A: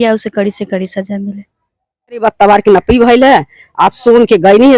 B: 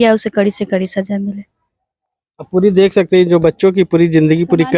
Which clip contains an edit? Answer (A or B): A